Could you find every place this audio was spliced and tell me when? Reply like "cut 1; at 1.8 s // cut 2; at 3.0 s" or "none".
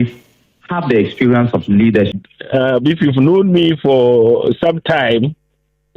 cut 1; at 2.1 s